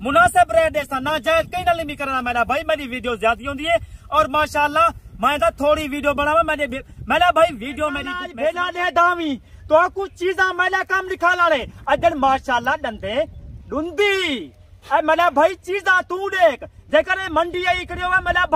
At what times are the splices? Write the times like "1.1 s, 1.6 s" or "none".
8.2 s

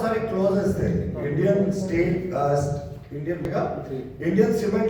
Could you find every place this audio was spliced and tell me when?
3.4 s

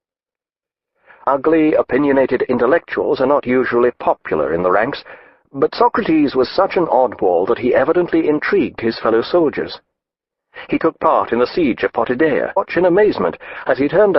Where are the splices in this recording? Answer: none

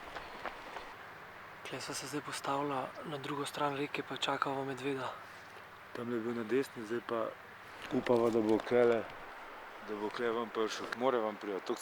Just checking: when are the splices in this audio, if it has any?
0.9 s

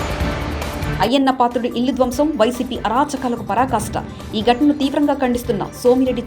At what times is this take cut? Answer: 0.9 s

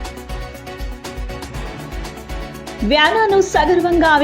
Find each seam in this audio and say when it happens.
2.7 s

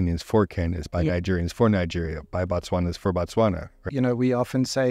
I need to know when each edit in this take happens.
3.9 s

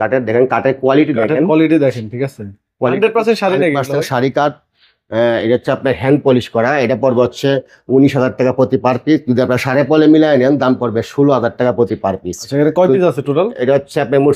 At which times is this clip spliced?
none

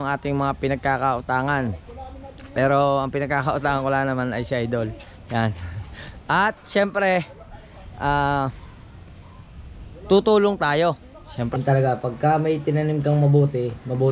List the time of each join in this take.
11.6 s

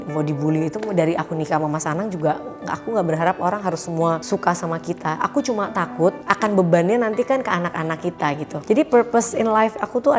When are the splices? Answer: 6.2 s, 8.5 s

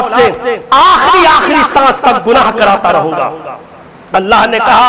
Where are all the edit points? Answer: none

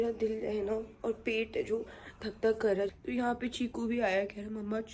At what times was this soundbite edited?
2.9 s

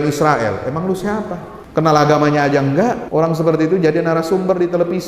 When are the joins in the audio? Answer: 1.5 s, 3.0 s

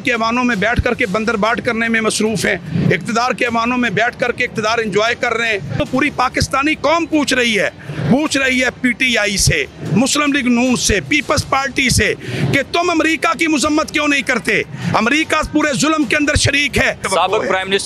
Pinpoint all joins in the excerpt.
5.8 s, 17.0 s

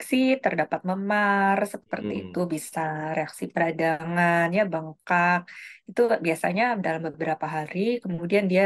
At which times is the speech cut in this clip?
none

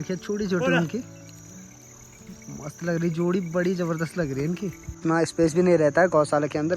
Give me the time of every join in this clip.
4.9 s

